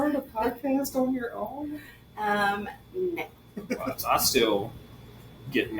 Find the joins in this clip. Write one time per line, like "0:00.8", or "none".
0:03.8